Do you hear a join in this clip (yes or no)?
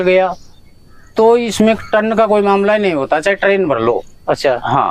no